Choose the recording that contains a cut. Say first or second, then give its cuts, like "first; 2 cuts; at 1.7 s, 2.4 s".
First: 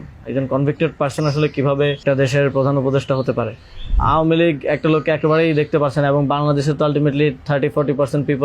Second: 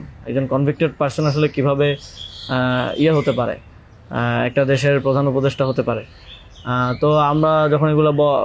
first; 2 cuts; at 2.0 s, 3.9 s